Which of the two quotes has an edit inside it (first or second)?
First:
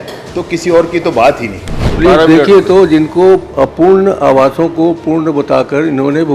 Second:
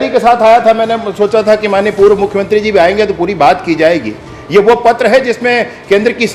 first